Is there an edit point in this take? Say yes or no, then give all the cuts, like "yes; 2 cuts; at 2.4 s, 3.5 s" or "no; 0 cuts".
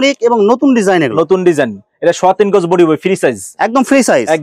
no; 0 cuts